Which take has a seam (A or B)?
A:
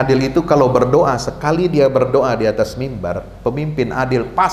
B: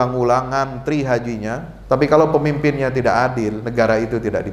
B